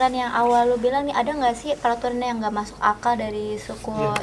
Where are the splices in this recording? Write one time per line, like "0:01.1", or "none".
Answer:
none